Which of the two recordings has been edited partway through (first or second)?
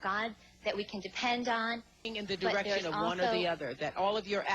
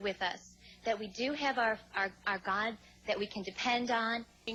first